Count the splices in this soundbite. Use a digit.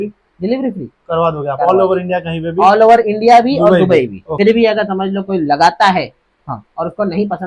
1